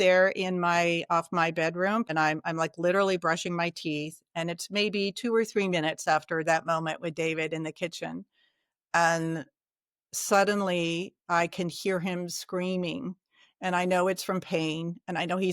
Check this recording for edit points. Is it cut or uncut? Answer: cut